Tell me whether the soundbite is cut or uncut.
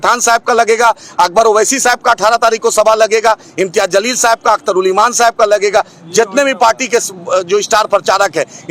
uncut